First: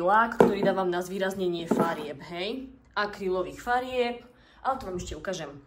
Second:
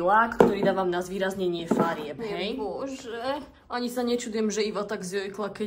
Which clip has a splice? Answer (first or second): second